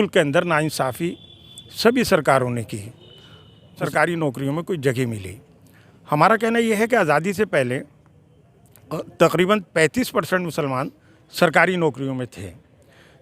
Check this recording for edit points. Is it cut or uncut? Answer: cut